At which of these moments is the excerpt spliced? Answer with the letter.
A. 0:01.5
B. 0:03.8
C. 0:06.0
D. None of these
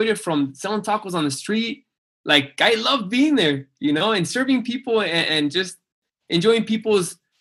C